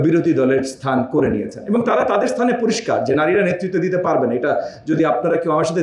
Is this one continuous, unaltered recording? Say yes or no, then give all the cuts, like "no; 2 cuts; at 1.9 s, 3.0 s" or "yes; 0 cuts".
yes; 0 cuts